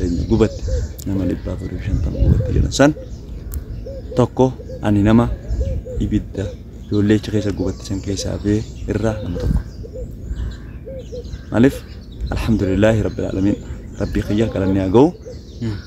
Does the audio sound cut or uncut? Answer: uncut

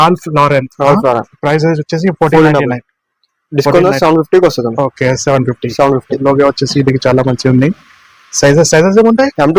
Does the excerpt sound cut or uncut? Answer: uncut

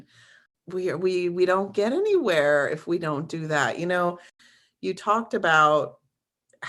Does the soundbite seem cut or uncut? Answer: cut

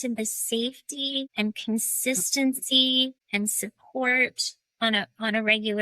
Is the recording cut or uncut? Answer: cut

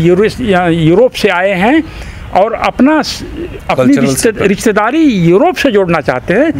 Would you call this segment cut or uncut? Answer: uncut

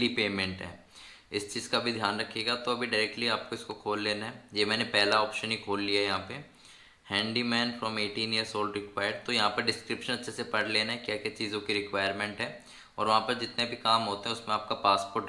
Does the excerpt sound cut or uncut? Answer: uncut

